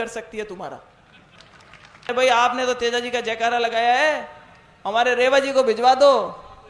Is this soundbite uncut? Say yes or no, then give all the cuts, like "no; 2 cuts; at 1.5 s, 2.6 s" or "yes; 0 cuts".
no; 1 cut; at 2.1 s